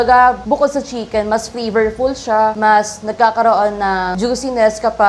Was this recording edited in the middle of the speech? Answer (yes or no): yes